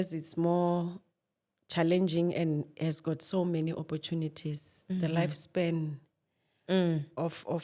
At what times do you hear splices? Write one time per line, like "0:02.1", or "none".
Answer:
none